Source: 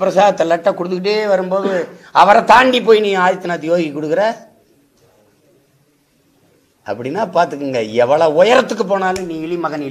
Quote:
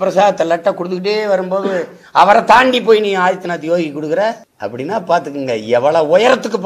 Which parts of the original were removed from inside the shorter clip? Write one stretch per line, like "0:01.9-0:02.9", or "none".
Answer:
0:04.5-0:06.8